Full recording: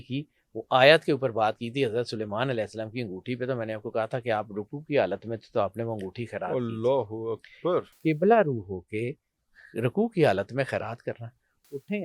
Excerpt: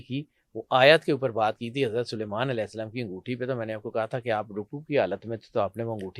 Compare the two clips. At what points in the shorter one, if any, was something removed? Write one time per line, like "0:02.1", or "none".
none

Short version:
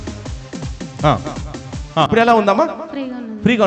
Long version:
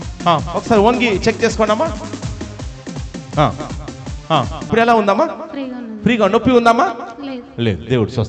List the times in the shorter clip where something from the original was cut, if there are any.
0:02.1

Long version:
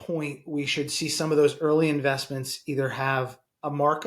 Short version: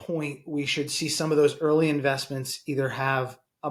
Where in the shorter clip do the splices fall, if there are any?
none

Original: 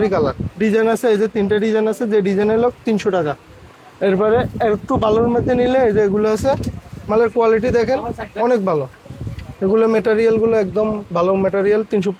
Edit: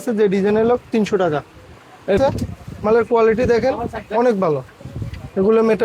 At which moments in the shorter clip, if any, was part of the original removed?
0:02.2

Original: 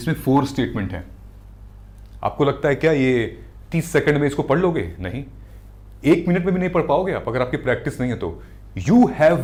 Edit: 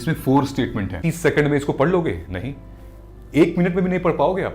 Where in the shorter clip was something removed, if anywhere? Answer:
0:00.9

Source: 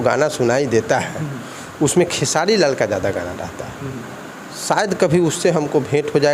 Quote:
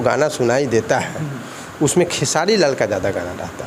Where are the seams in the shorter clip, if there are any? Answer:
none

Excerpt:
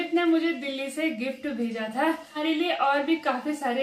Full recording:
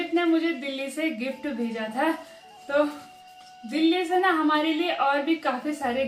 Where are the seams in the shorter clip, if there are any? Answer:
0:02.4

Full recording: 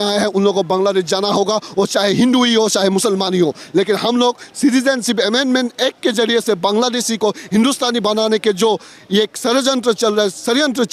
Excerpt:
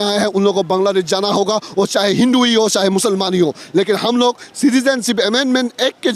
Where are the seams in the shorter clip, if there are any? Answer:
none

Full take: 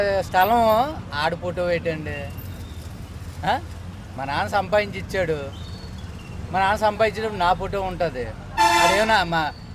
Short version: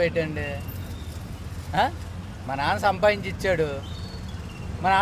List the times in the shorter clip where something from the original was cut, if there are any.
none

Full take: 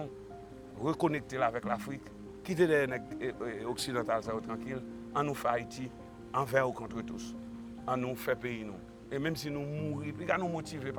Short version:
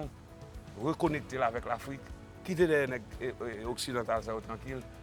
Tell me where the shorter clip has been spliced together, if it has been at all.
none

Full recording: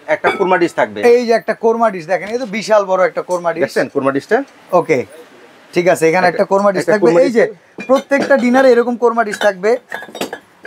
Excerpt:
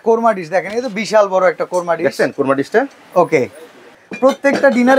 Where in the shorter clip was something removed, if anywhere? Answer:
0:04.0

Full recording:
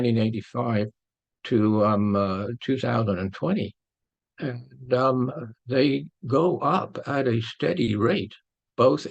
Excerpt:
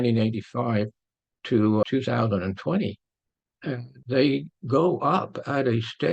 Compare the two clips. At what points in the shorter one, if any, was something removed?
0:01.8
0:03.9

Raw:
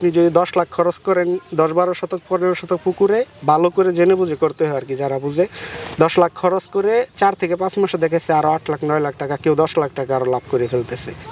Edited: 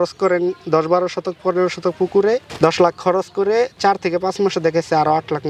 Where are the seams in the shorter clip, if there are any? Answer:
0:02.5

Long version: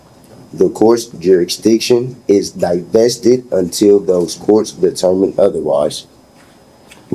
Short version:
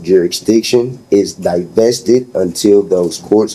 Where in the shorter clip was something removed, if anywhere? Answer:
none

